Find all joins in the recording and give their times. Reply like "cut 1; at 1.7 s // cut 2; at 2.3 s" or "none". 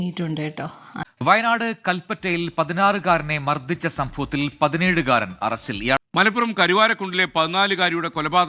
cut 1; at 1.0 s // cut 2; at 6.0 s